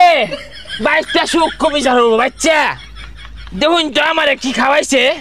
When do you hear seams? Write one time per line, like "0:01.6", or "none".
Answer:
none